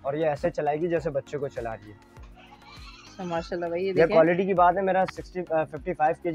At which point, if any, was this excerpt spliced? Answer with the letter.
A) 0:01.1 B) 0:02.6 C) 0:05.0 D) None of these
D